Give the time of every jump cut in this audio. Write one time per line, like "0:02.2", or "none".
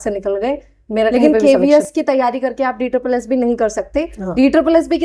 0:01.1